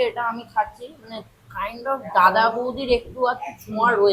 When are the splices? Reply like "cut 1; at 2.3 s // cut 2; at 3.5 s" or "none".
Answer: none